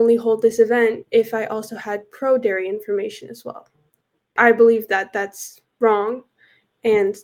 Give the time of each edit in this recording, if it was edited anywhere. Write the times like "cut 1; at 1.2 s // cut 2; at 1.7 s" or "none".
cut 1; at 4.3 s